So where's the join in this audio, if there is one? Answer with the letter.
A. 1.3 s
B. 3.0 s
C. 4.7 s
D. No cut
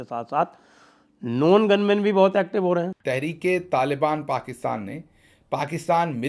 B